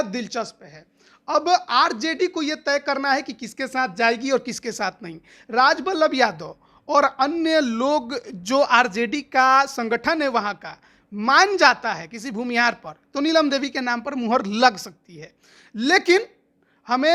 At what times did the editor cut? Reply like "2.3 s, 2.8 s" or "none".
none